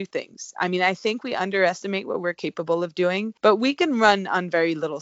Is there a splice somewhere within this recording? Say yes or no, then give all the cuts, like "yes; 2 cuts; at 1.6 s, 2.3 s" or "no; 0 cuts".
yes; 1 cut; at 3.3 s